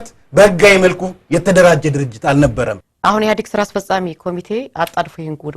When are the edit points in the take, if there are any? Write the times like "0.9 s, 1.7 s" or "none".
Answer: 2.8 s